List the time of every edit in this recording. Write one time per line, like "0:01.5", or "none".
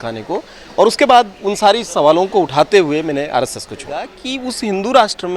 0:04.1

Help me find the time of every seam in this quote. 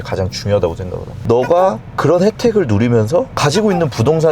0:01.2

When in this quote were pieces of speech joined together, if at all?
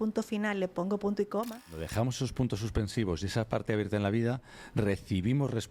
0:01.8

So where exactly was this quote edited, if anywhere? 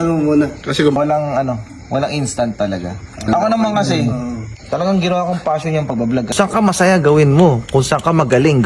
0:01.0
0:06.3

